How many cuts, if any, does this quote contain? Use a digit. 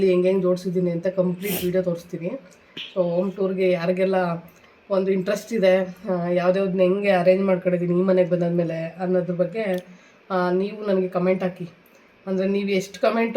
0